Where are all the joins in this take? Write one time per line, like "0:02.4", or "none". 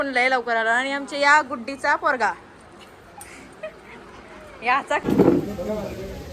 0:05.0